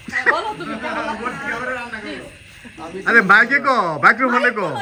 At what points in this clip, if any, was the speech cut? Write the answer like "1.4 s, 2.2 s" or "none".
none